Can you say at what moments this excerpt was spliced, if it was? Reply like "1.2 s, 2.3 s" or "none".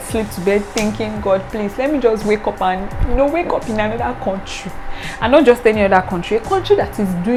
none